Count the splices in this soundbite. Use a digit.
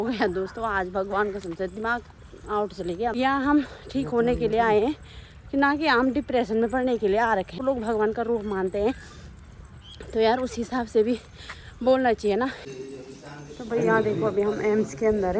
3